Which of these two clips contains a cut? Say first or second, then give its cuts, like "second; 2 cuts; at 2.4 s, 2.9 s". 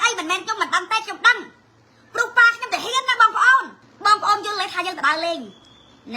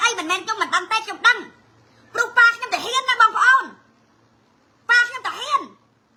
first; 1 cut; at 3.8 s